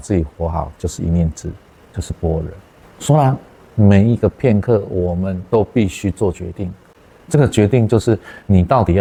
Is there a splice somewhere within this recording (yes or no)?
no